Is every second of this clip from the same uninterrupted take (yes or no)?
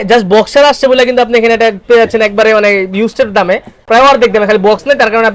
yes